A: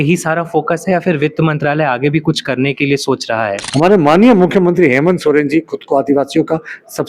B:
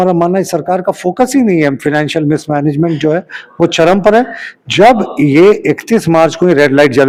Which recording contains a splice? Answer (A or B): A